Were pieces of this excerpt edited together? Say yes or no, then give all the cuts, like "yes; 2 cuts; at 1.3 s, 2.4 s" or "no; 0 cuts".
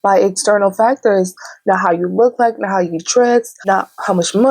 yes; 1 cut; at 3.6 s